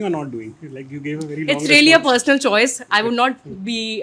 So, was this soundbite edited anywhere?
no; 0 cuts

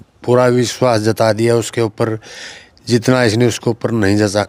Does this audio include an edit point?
no; 0 cuts

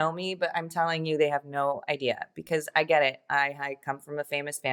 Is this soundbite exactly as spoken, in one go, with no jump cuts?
yes; 0 cuts

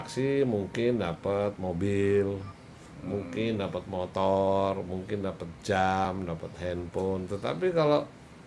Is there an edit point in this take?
no; 0 cuts

